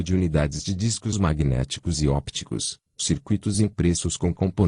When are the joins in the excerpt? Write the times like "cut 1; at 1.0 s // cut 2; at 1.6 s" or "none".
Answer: none